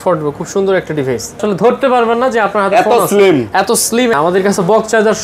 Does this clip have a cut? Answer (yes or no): yes